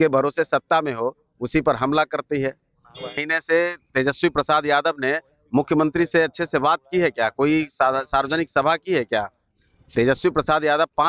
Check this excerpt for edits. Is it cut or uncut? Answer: cut